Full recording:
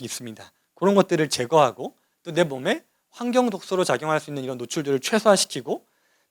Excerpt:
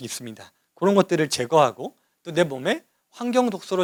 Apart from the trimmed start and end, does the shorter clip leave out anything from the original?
no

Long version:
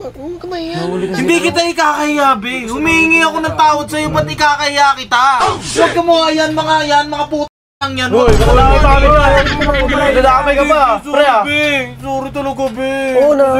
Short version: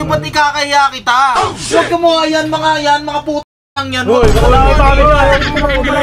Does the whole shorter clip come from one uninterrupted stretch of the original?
yes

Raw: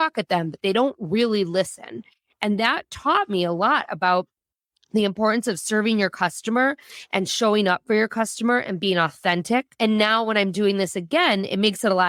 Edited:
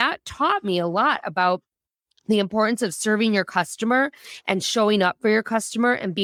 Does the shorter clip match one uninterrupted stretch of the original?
yes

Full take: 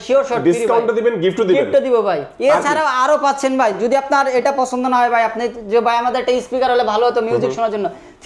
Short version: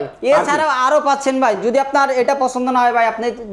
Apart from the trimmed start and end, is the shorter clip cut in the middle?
no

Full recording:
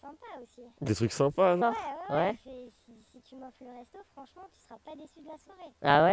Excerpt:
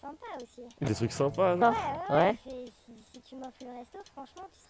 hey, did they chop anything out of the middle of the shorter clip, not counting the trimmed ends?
no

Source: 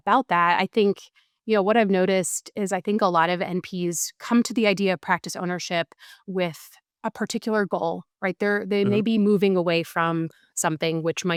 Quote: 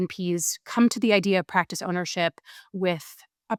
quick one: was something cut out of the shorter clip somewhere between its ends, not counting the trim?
no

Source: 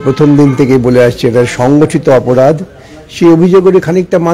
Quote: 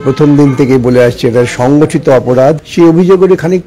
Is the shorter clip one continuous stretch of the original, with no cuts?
no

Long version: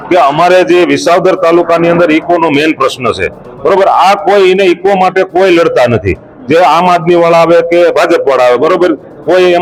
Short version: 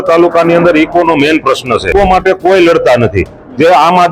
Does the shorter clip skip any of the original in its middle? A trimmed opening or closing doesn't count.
yes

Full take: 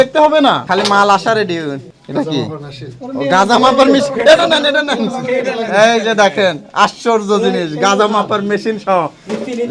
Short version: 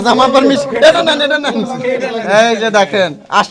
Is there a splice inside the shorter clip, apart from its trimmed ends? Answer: no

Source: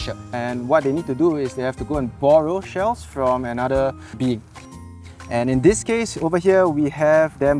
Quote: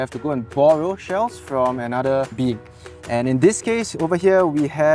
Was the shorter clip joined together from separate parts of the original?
yes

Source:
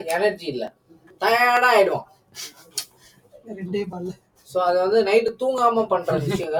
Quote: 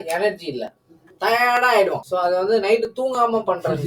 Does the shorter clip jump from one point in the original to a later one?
yes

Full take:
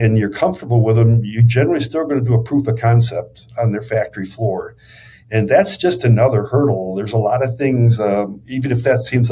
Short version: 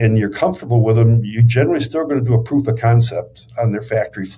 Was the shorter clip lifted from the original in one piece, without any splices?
yes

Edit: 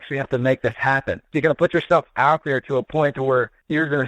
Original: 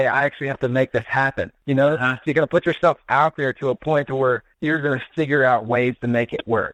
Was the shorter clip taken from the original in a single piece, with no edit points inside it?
no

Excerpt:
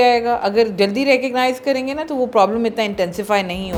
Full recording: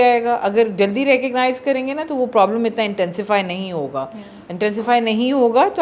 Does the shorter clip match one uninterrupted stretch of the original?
yes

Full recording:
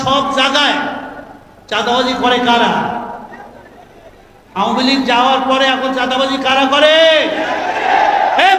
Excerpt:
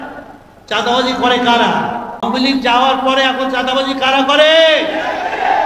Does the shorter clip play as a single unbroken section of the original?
no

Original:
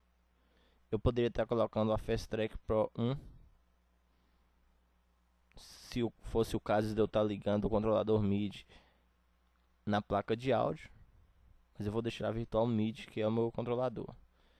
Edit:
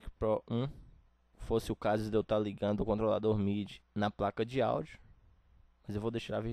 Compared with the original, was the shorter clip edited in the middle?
yes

